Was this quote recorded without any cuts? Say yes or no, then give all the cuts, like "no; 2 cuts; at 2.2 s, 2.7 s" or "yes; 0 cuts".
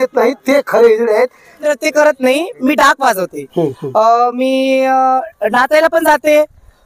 no; 1 cut; at 1.6 s